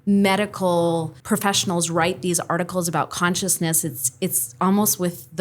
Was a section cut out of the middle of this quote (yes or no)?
yes